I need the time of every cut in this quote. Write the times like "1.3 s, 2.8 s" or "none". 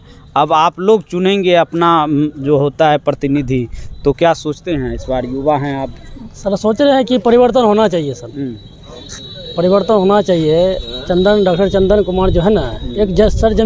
none